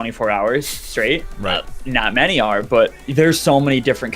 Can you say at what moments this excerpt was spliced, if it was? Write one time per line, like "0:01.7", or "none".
0:01.6
0:03.0